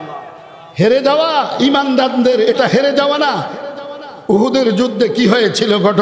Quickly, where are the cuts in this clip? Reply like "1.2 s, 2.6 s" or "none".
none